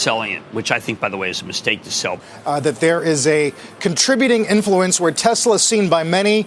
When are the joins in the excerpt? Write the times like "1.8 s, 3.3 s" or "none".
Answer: 2.2 s